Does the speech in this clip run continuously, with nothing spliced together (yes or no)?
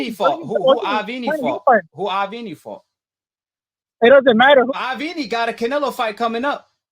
no